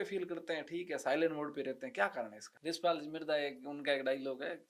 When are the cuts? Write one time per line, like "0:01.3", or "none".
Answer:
0:02.5